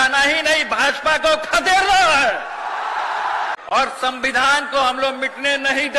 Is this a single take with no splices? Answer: no; 1 cut; at 3.5 s

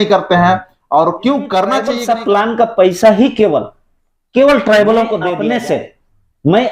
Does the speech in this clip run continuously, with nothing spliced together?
no; 2 cuts; at 1.9 s, 5.3 s

